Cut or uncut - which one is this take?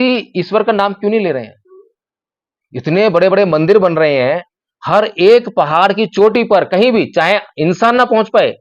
uncut